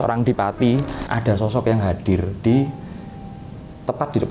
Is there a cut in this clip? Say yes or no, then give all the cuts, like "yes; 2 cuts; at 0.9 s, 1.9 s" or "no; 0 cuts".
yes; 1 cut; at 1.0 s